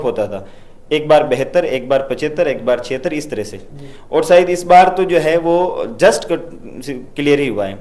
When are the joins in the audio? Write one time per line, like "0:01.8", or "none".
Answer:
none